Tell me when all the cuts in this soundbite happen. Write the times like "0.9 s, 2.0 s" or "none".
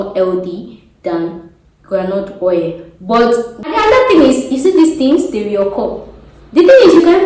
3.7 s